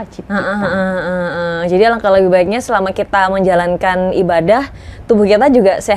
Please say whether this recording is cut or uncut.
uncut